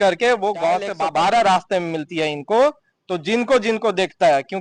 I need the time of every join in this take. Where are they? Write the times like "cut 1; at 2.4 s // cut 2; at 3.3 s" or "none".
cut 1; at 1.0 s